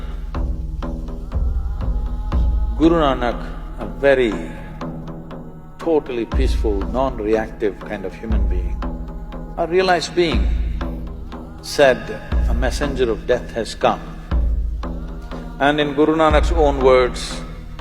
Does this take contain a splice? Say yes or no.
no